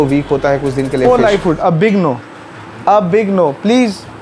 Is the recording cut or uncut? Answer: cut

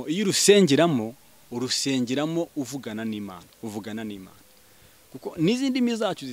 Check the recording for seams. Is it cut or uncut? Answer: uncut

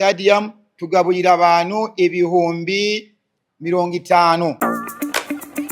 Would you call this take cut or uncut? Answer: cut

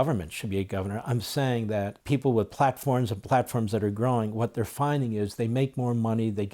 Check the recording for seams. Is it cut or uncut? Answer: cut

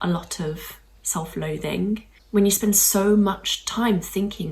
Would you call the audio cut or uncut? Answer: cut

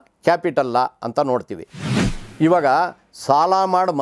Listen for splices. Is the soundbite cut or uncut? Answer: cut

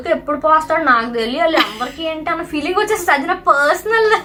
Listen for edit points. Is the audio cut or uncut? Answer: uncut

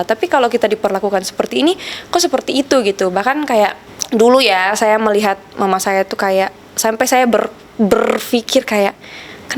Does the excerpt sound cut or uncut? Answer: uncut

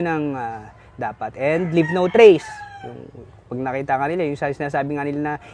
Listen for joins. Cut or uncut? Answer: uncut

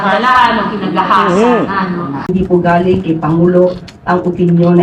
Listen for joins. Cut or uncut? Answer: cut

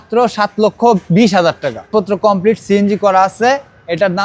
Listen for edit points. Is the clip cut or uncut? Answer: cut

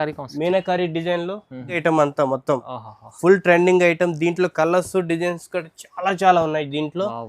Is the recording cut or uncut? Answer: cut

